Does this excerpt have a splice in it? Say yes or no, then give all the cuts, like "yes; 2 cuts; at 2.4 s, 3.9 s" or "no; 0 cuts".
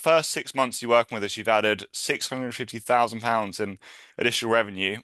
no; 0 cuts